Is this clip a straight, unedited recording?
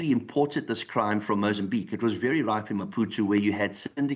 yes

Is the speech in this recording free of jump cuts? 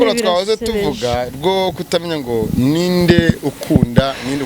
yes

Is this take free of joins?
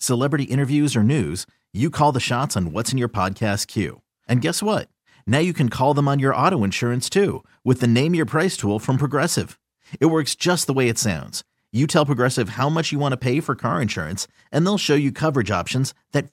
yes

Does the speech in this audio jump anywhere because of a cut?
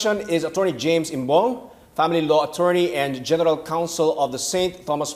no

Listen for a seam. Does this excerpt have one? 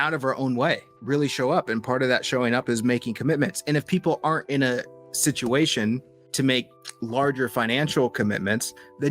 yes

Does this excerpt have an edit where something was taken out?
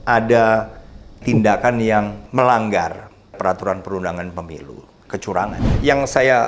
yes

